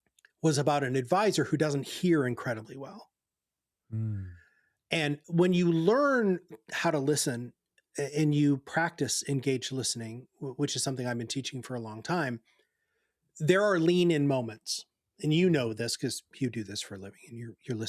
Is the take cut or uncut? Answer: cut